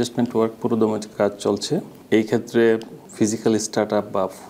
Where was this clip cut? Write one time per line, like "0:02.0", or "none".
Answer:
0:01.1
0:02.0
0:03.0